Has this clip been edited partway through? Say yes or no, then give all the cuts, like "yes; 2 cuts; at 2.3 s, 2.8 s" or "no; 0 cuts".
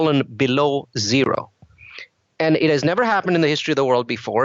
no; 0 cuts